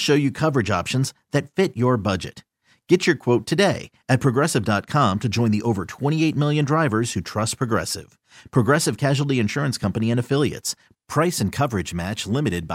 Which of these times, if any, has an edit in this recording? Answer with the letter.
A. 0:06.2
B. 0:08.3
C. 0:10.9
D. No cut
D